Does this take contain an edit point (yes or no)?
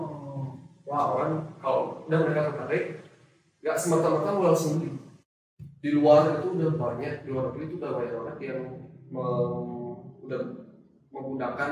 yes